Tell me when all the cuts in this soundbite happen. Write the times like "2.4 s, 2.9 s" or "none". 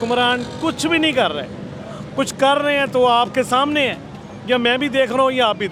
none